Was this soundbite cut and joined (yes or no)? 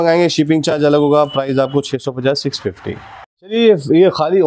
no